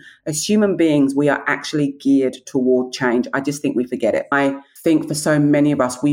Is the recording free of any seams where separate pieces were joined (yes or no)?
no